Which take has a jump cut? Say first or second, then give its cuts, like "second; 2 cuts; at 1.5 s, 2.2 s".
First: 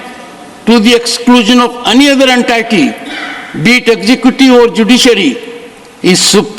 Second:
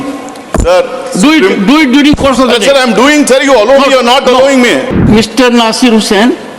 second; 1 cut; at 5.0 s